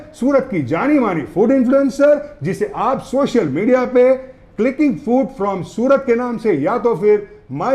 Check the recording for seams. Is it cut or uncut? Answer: uncut